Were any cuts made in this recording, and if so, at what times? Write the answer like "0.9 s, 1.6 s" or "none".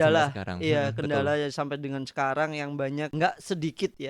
3.1 s